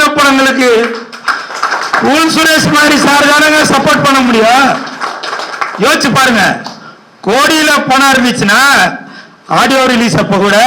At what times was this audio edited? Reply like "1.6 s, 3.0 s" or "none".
none